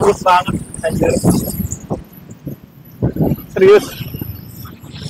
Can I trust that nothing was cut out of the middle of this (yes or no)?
yes